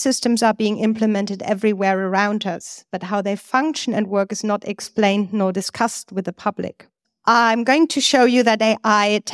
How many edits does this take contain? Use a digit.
1